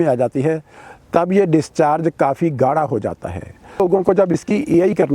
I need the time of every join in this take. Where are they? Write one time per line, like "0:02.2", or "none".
0:03.8